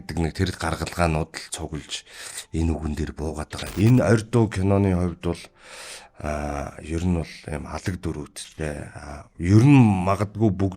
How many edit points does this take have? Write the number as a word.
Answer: one